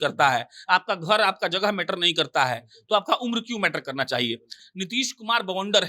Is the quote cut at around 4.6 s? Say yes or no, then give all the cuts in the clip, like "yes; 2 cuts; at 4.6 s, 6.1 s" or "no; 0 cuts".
yes; 1 cut; at 4.6 s